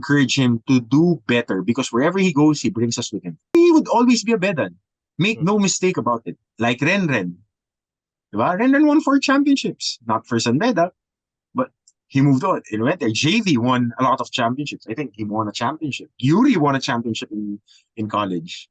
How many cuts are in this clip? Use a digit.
1